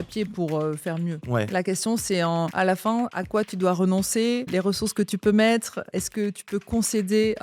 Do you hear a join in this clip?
yes; 4 cuts; at 1.2 s, 2.9 s, 4.5 s, 5.8 s

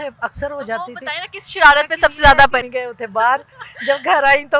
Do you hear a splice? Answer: yes; 1 cut; at 2.7 s

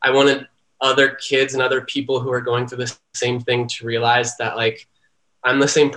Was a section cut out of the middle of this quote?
no; 0 cuts

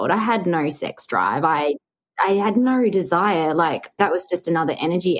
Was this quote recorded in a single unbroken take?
no; 1 cut; at 3.9 s

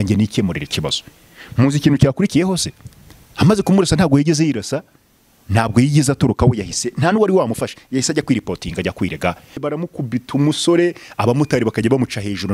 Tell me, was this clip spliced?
yes; 1 cut; at 9.6 s

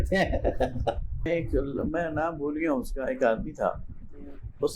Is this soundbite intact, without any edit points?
no; 1 cut; at 1.3 s

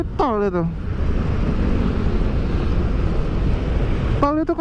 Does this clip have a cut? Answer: no; 0 cuts

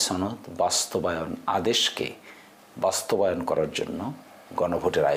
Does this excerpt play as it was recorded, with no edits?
yes; 0 cuts

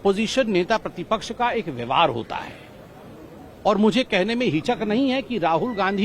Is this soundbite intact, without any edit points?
yes; 0 cuts

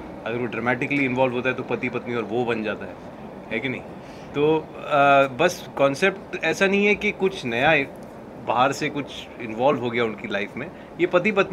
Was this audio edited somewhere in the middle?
no; 0 cuts

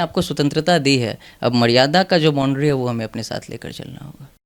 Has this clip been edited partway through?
no; 0 cuts

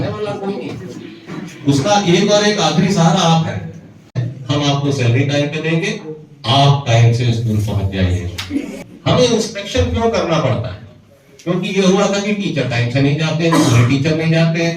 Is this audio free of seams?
no; 2 cuts; at 4.3 s, 8.7 s

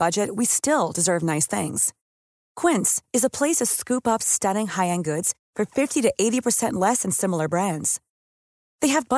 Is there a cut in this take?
no; 0 cuts

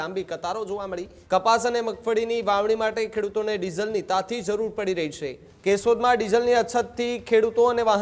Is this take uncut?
no; 2 cuts; at 1.1 s, 5.4 s

